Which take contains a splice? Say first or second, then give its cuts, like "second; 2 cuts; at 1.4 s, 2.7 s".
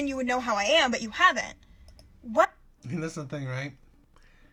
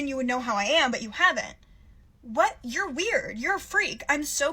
second; 1 cut; at 2.5 s